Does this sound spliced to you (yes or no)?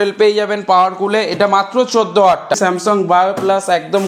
yes